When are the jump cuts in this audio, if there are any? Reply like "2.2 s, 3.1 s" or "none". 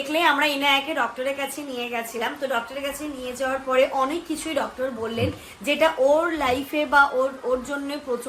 none